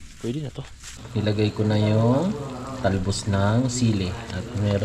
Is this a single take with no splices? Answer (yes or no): no